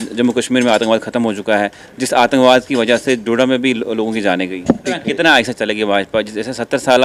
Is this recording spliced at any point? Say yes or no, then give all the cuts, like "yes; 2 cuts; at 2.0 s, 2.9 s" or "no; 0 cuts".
yes; 1 cut; at 4.9 s